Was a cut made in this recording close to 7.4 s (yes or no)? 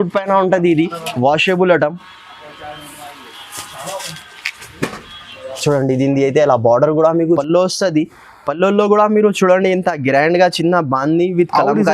yes